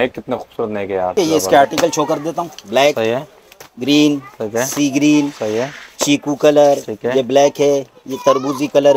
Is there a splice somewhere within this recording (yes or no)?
yes